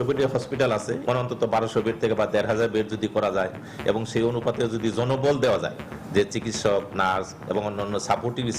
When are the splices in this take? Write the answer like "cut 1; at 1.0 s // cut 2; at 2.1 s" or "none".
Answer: cut 1; at 1.0 s